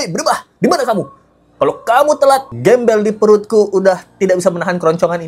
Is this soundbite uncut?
yes; 0 cuts

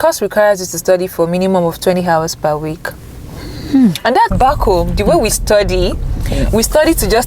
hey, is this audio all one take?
no; 1 cut; at 4.3 s

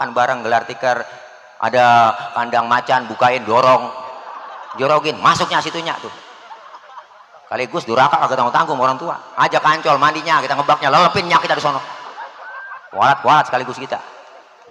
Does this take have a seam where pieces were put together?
no; 0 cuts

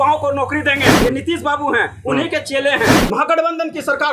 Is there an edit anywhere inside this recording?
yes; 2 cuts; at 1.0 s, 3.0 s

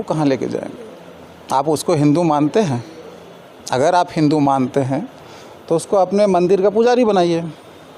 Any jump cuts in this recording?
no; 0 cuts

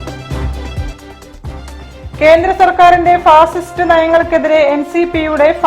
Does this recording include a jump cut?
yes; 1 cut; at 1.7 s

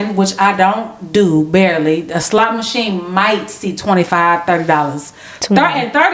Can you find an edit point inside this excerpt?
no; 0 cuts

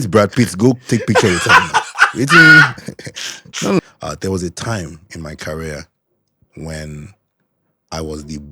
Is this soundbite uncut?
no; 1 cut; at 3.8 s

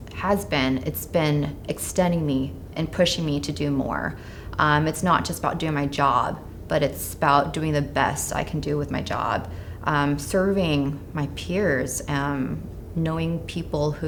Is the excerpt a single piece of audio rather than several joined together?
yes; 0 cuts

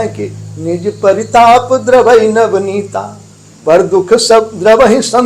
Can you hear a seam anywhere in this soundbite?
no; 0 cuts

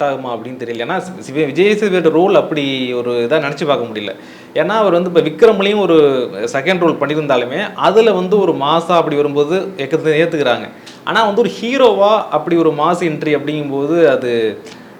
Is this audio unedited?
yes; 0 cuts

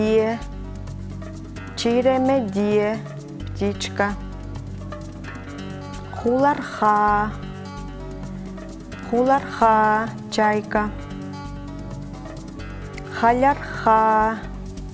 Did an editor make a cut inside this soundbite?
no; 0 cuts

